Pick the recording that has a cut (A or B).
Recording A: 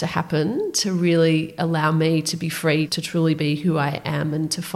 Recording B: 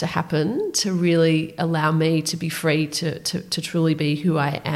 A